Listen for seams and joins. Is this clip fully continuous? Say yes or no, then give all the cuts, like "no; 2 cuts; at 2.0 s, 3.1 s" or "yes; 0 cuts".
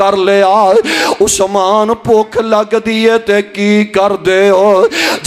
yes; 0 cuts